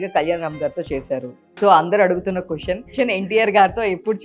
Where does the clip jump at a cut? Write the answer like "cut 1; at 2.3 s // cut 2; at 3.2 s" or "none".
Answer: cut 1; at 3.0 s